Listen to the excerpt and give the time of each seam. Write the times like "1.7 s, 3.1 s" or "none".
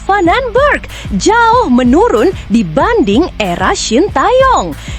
none